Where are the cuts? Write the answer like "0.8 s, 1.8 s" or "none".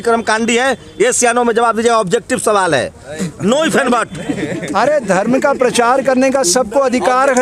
none